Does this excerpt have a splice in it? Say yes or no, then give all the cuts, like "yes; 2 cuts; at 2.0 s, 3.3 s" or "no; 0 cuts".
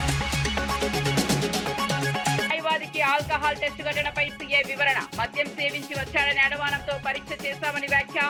no; 0 cuts